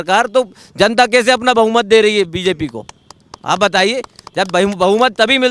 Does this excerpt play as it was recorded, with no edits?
yes; 0 cuts

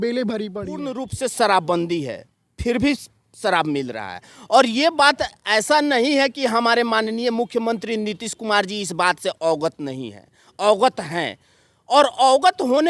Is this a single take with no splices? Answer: no; 1 cut; at 1.1 s

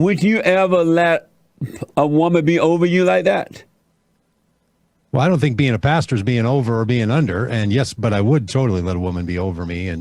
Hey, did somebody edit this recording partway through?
no; 0 cuts

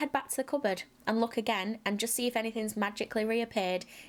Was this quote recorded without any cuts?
yes; 0 cuts

